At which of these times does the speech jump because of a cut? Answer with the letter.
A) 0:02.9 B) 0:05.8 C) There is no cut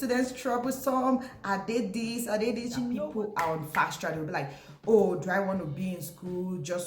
A